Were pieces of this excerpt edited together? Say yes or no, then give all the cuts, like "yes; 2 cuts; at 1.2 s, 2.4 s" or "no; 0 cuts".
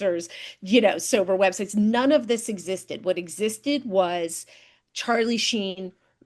no; 0 cuts